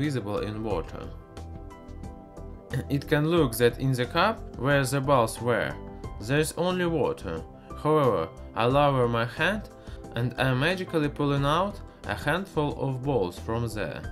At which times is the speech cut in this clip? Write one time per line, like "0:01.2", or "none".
none